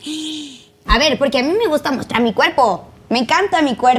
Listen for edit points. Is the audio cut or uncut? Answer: cut